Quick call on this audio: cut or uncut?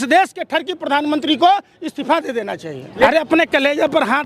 cut